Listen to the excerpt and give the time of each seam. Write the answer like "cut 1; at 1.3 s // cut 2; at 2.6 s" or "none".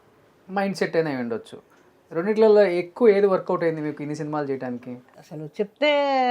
cut 1; at 5.1 s